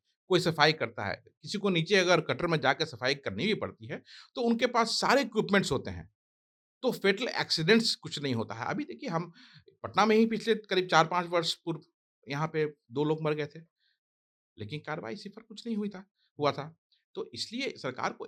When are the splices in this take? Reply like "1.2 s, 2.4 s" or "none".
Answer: none